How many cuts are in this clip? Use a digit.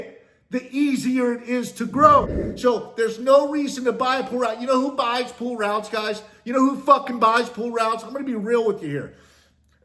1